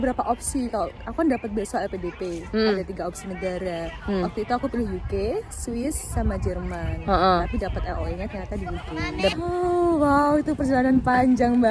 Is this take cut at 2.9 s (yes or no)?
no